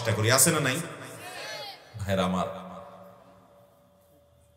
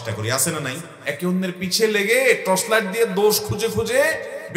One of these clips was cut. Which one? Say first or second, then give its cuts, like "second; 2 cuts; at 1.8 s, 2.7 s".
second; 1 cut; at 0.9 s